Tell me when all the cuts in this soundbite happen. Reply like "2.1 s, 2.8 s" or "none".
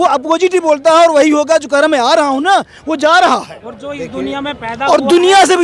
none